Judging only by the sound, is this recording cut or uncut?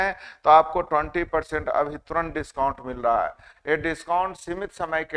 uncut